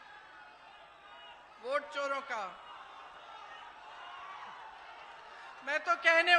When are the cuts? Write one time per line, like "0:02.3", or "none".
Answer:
none